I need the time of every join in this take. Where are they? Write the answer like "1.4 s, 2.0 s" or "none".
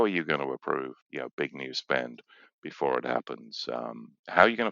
1.0 s

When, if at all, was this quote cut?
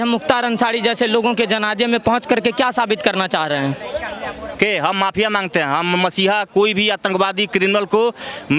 4.4 s

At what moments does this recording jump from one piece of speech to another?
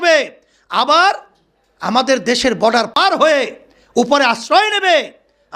3.0 s

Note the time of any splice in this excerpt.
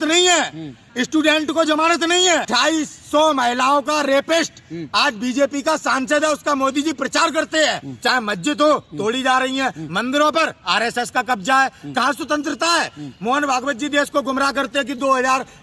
2.5 s, 7.9 s

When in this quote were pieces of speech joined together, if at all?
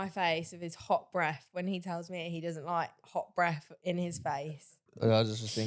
4.4 s

